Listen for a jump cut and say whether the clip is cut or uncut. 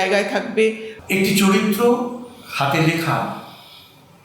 cut